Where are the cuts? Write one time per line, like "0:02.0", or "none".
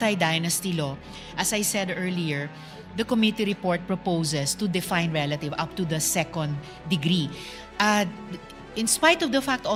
none